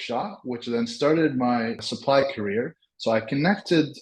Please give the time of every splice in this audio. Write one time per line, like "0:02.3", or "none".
0:01.8
0:02.8